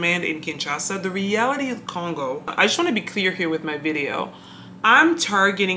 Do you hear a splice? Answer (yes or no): yes